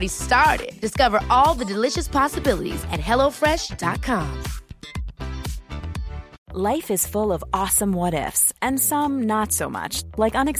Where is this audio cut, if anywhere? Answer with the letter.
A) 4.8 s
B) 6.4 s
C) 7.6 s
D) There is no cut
B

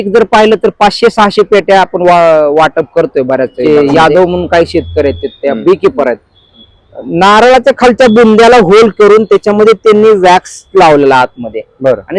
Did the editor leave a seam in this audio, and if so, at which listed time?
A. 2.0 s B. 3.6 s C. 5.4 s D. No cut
B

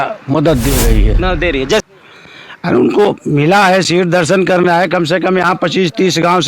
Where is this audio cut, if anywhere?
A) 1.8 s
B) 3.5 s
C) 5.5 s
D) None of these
A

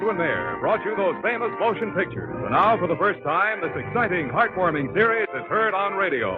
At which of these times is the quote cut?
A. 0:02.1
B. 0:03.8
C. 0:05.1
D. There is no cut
A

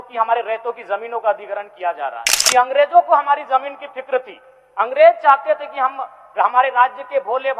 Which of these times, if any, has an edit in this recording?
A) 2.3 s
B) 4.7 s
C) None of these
A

